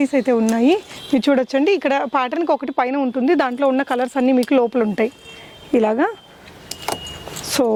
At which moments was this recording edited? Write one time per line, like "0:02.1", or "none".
none